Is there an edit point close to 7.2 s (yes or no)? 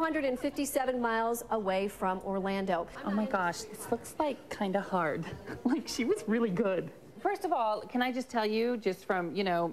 no